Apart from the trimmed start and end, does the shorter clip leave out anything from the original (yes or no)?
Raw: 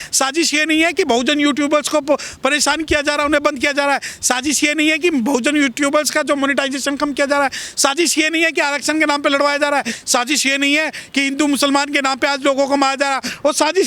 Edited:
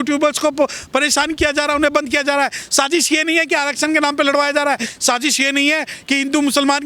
yes